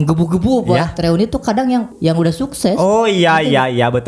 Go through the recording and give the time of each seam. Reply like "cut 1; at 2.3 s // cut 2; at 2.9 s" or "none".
cut 1; at 1.9 s